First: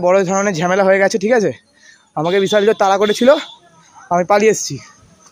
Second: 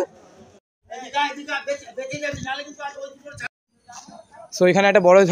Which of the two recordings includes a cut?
second; 2 cuts; at 1.1 s, 3.4 s

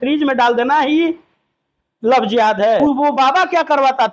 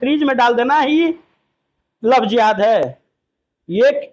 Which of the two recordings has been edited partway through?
first; 1 cut; at 2.8 s

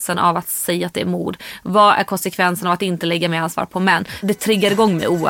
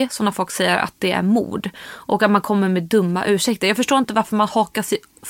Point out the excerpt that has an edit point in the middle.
first; 1 cut; at 4.2 s

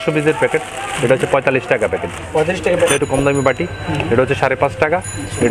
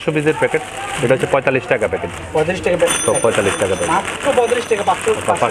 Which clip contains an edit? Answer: first; 1 cut; at 2.9 s

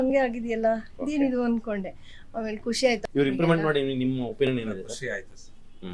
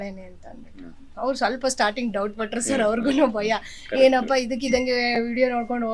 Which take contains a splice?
first; 1 cut; at 3.0 s

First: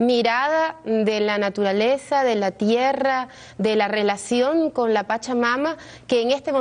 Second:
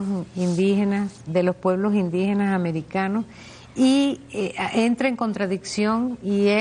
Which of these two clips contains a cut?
first; 1 cut; at 4.4 s

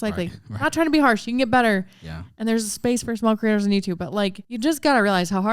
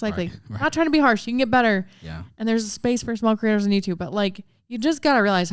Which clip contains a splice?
first; 1 cut; at 4.4 s

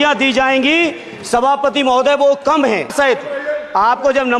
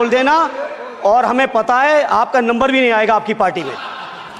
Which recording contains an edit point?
first; 1 cut; at 2.9 s

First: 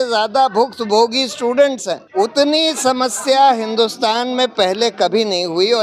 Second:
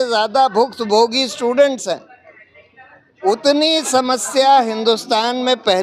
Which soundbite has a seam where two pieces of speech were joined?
first; 1 cut; at 2.0 s

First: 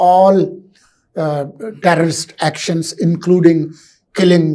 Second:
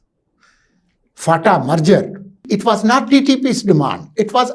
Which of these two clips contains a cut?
second; 1 cut; at 2.3 s

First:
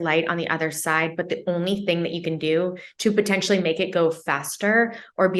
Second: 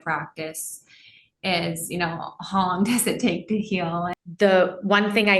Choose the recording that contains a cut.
second; 1 cut; at 4.1 s

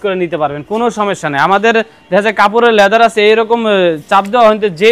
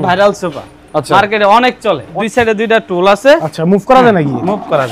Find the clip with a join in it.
second; 1 cut; at 2.1 s

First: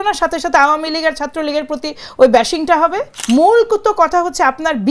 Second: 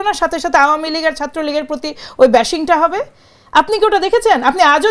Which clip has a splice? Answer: first; 1 cut; at 3.1 s

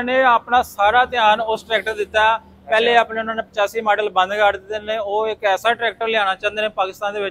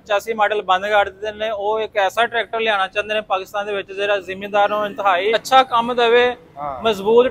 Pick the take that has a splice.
second; 1 cut; at 5.3 s

